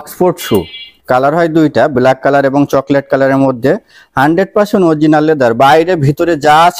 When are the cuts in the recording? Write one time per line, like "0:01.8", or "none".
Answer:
none